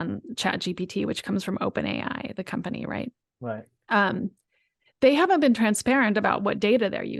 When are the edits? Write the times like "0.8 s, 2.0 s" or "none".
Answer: none